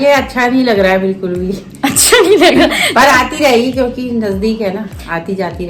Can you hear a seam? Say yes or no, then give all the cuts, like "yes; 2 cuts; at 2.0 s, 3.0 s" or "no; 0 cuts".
no; 0 cuts